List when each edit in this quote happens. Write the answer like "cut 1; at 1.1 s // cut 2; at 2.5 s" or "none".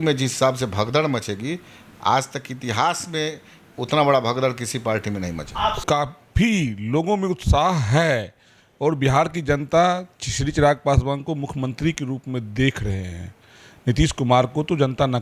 cut 1; at 5.8 s

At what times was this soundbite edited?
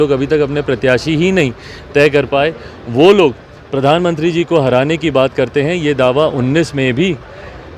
none

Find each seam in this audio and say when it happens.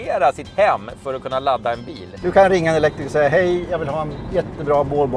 cut 1; at 2.0 s

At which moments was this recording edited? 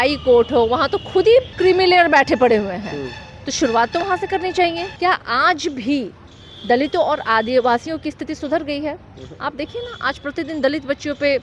cut 1; at 1.5 s // cut 2; at 4.9 s

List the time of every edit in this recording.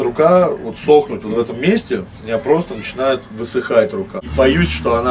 cut 1; at 4.2 s

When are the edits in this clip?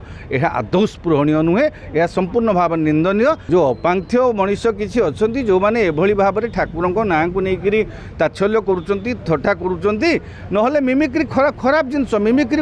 cut 1; at 3.5 s

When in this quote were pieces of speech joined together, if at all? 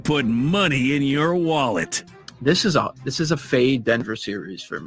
none

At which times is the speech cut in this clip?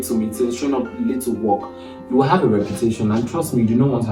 none

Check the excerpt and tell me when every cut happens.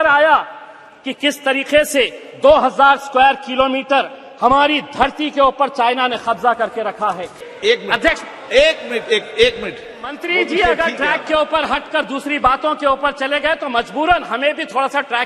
cut 1; at 7.4 s // cut 2; at 10.2 s

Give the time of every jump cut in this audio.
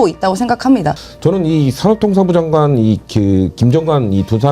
cut 1; at 1.0 s

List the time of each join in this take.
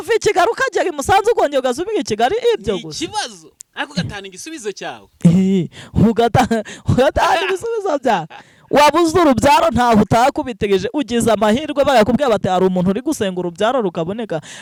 none

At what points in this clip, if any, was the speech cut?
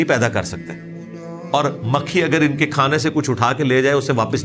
none

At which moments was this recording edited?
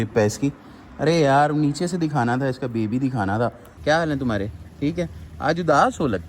cut 1; at 3.7 s

